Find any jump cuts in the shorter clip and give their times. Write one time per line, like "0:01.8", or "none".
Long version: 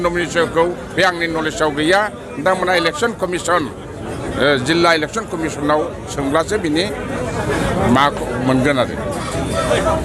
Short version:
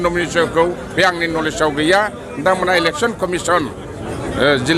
none